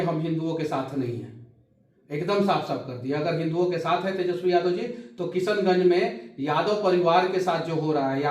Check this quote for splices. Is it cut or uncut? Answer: uncut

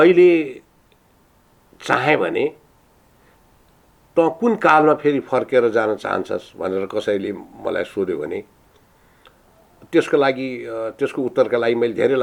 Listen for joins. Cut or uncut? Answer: uncut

